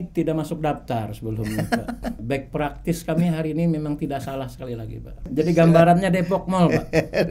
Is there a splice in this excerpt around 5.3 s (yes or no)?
yes